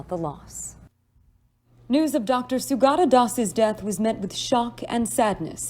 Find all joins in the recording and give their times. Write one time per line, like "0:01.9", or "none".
0:03.4